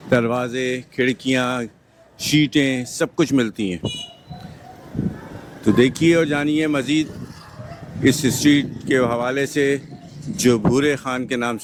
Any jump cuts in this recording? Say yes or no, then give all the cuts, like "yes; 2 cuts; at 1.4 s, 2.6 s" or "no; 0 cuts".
no; 0 cuts